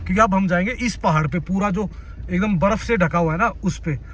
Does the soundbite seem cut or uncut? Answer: uncut